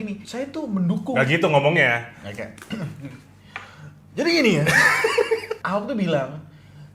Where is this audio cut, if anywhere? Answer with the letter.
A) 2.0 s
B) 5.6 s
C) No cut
B